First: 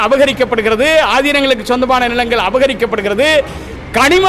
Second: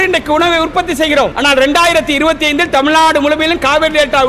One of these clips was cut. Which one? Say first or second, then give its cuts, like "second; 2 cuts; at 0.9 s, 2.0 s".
second; 1 cut; at 1.3 s